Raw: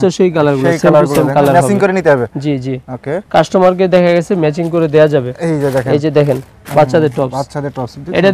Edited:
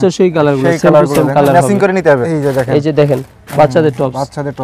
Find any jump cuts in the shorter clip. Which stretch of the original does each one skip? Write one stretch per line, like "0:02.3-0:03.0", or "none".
0:02.3-0:05.5